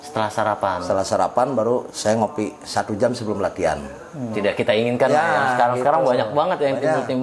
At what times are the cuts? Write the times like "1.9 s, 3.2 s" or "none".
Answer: 4.3 s